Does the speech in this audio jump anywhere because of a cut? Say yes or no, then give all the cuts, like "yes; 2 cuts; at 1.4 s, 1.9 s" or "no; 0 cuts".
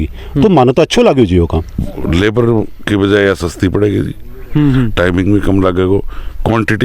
yes; 1 cut; at 1.9 s